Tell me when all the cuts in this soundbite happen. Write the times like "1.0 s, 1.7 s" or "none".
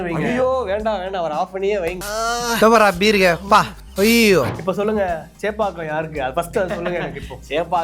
4.5 s

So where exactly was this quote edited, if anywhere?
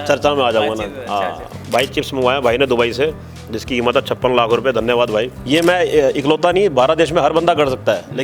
1.5 s, 5.4 s

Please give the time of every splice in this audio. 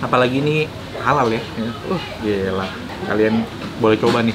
2.9 s

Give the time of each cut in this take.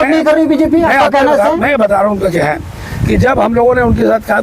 none

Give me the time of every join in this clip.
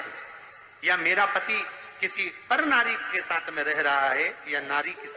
none

